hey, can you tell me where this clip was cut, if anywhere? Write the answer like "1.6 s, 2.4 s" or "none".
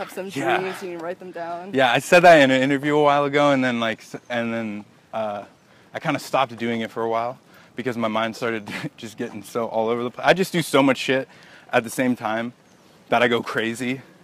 none